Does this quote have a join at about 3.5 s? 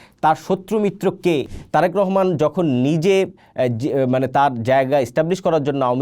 no; 1 cut; at 1.5 s

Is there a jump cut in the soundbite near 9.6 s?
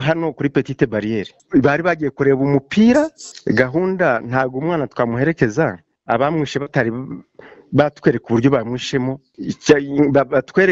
no; 1 cut; at 3.3 s

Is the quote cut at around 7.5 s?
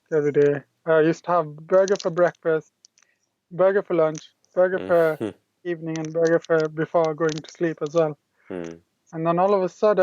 no; 1 cut; at 8.9 s

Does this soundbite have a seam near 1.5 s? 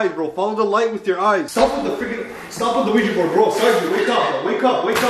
yes; 1 cut; at 1.5 s

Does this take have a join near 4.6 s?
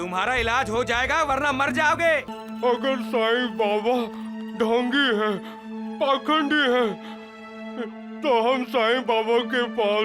no; 1 cut; at 2.3 s

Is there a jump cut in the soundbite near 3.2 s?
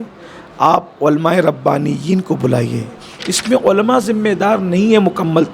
yes; 1 cut; at 3.2 s

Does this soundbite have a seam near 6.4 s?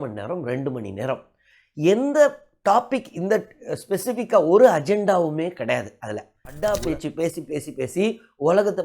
yes; 1 cut; at 6.4 s

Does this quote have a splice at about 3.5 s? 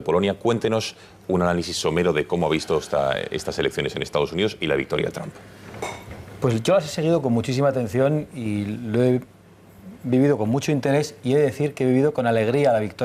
no; 1 cut; at 10.5 s

